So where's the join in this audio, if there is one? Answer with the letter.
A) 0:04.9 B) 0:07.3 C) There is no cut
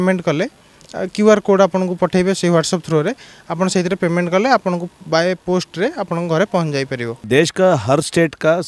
B